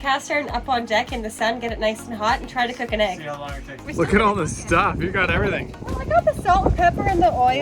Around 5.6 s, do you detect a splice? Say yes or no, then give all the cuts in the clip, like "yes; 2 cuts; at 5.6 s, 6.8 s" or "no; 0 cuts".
no; 1 cut; at 3.8 s